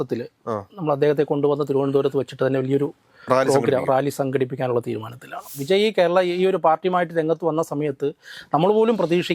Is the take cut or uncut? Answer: cut